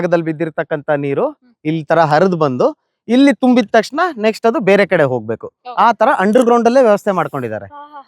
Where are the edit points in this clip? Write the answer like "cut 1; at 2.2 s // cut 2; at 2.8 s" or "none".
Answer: none